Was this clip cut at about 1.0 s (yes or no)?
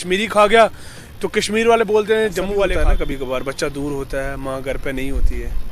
no